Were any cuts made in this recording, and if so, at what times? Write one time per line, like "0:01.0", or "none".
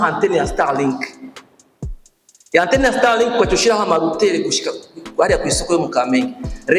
0:01.2
0:02.4